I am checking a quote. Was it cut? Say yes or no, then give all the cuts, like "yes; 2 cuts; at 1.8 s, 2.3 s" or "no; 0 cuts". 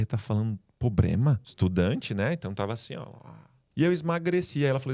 yes; 2 cuts; at 1.5 s, 3.6 s